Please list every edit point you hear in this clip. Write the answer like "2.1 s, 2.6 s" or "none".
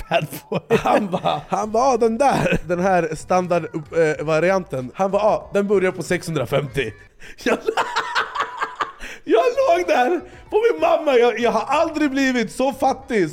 1.4 s, 2.6 s, 4.8 s